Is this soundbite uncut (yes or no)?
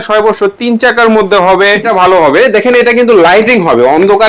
no